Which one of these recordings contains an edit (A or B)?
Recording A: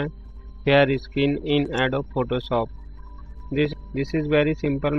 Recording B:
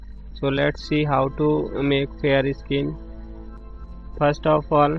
A